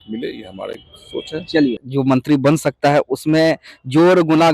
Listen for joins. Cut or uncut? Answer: cut